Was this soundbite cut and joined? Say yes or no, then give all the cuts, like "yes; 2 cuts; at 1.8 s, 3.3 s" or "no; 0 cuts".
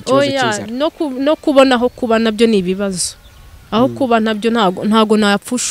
no; 0 cuts